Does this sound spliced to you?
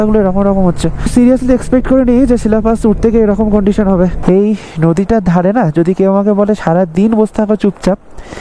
yes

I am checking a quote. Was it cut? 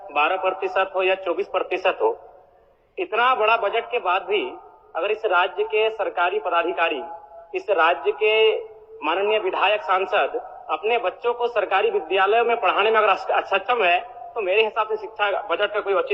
no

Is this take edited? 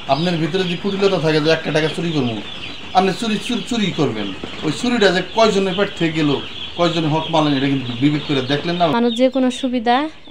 yes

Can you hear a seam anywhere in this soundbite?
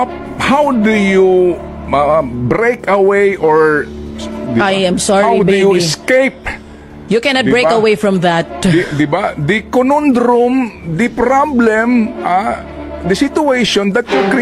no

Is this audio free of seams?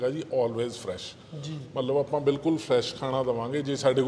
yes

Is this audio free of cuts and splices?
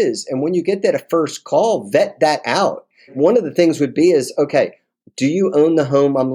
no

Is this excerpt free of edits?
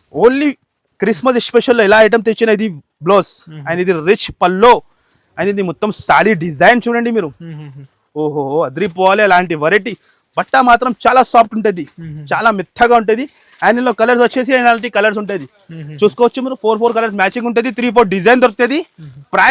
yes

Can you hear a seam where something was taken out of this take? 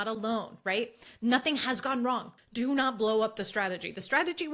yes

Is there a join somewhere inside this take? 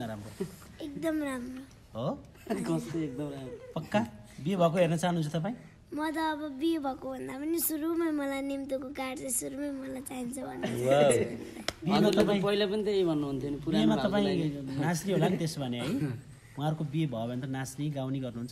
no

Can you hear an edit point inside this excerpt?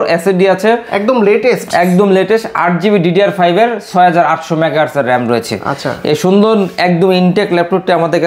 no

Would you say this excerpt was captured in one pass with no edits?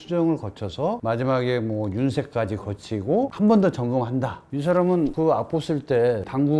no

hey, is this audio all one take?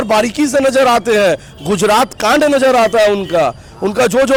yes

